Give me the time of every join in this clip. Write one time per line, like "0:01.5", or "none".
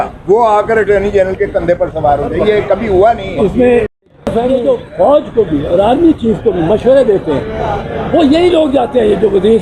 0:03.9